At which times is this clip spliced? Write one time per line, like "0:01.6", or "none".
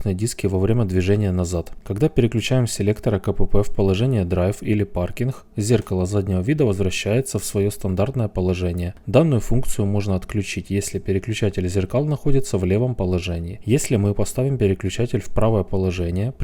none